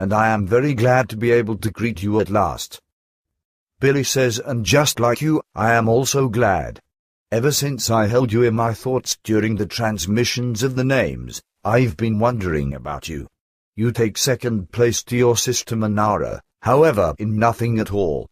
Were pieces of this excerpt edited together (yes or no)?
no